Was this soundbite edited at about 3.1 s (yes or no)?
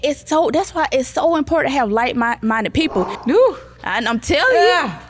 yes